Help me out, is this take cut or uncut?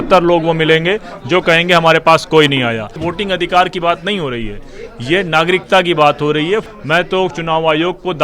cut